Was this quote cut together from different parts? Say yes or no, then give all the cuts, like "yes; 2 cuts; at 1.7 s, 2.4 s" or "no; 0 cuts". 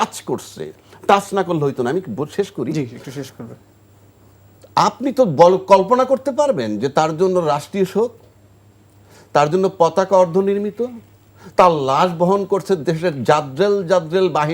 no; 0 cuts